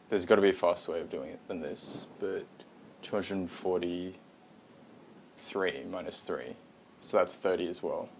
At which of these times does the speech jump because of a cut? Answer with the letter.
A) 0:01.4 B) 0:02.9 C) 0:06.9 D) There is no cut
D